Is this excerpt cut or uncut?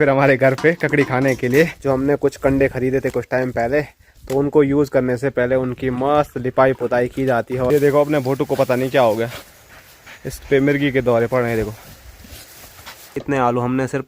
cut